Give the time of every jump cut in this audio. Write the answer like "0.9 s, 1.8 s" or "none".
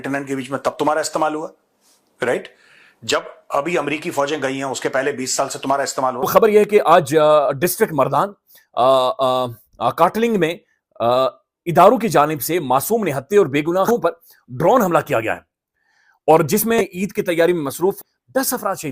6.2 s, 13.9 s, 16.8 s, 18.0 s

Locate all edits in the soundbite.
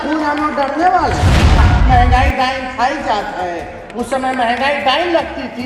1.6 s

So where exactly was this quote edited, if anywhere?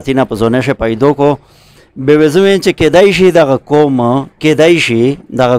none

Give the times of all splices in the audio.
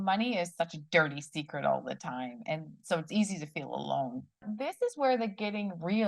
4.5 s

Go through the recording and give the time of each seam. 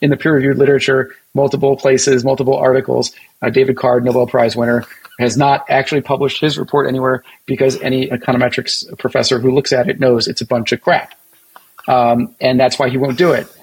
8.1 s

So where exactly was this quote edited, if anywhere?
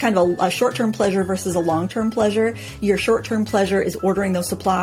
none

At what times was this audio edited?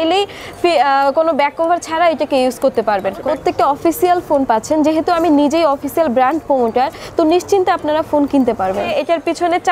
3.2 s, 8.9 s

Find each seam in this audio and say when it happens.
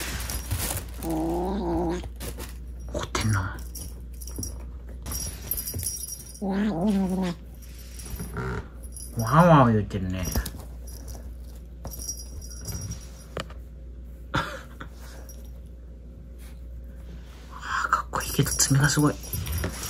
5.1 s

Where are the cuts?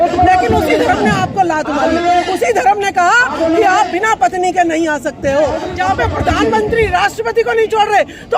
5.6 s

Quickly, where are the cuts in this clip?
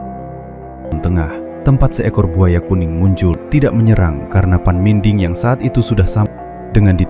0.9 s, 3.4 s, 6.3 s

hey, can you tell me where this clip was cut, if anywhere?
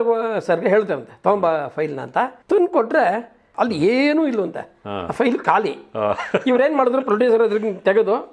2.4 s, 3.4 s

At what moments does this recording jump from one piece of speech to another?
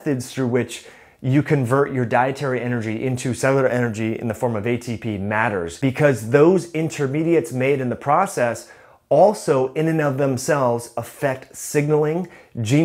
5.7 s

